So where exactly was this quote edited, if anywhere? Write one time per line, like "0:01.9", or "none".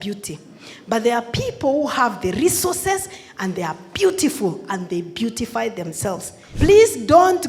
0:06.4